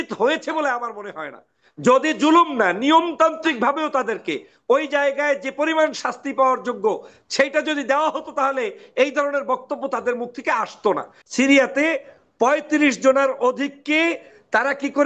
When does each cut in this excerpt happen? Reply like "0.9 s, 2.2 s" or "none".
11.2 s